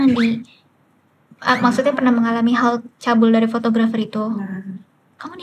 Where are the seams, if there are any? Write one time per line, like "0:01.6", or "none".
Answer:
none

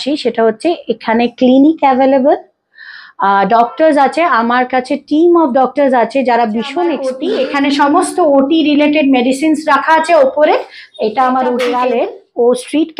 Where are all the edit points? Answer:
0:07.1
0:11.7

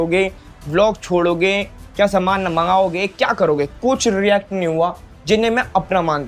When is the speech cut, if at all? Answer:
none

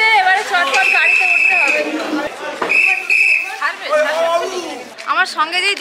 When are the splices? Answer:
0:02.3
0:04.9

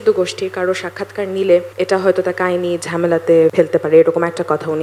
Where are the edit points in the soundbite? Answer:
0:01.7
0:03.5

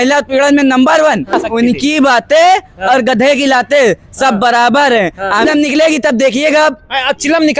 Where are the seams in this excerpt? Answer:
0:01.4
0:05.4

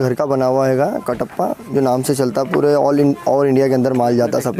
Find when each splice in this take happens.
none

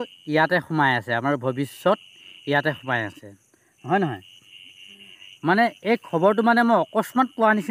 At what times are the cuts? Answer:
none

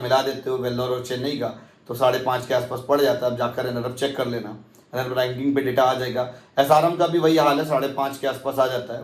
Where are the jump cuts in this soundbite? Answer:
none

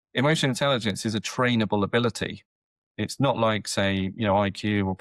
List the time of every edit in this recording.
none

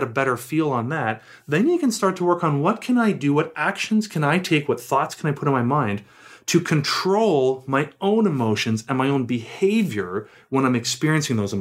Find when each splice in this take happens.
none

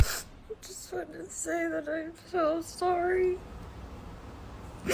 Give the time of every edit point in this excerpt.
none

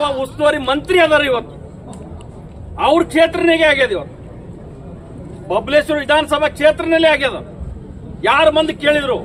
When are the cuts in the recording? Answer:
none

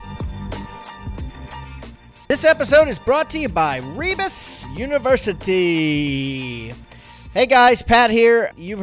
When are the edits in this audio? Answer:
none

